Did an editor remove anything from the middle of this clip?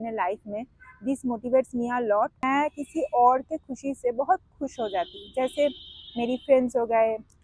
yes; 1 cut; at 2.4 s

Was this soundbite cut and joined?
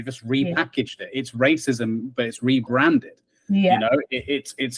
no; 0 cuts

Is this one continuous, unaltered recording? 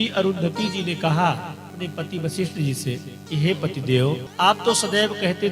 no; 3 cuts; at 1.7 s, 3.1 s, 4.3 s

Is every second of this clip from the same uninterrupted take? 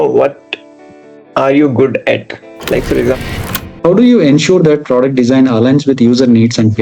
no; 1 cut; at 3.1 s

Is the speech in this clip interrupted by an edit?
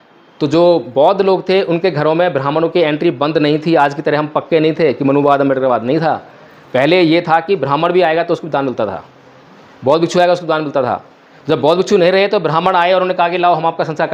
no; 0 cuts

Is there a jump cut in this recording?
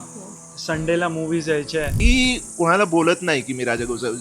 yes; 1 cut; at 2.0 s

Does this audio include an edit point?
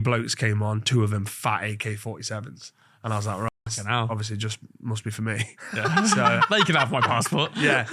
no; 0 cuts

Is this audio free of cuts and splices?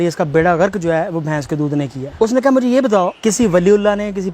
no; 2 cuts; at 2.0 s, 3.1 s

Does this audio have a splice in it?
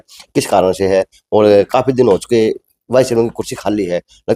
no; 0 cuts

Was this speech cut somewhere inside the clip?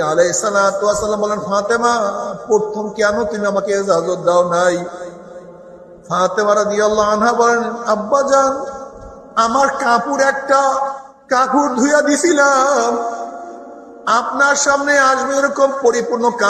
yes; 1 cut; at 11.1 s

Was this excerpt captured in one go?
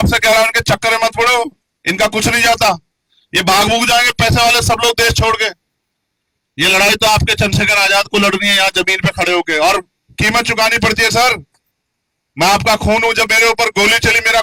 yes; 0 cuts

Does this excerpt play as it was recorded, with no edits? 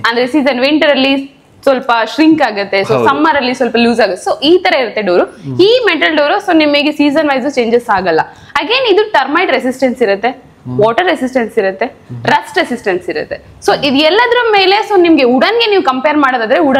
yes; 0 cuts

